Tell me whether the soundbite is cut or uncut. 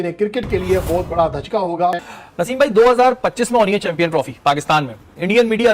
cut